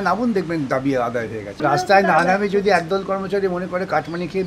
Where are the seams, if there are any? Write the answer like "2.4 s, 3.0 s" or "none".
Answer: 1.5 s